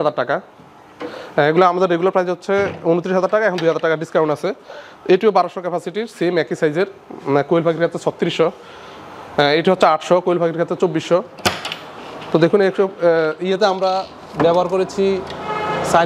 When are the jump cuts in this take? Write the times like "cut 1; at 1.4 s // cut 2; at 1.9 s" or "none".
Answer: none